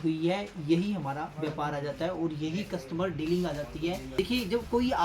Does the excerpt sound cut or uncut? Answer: cut